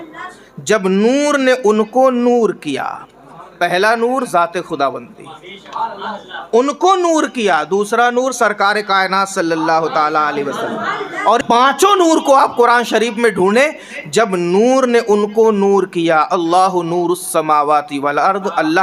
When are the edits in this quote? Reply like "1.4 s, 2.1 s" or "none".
11.4 s

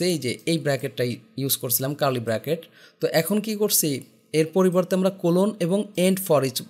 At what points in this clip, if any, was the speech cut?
none

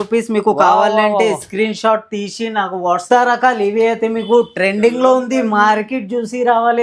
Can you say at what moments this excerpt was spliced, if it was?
3.0 s

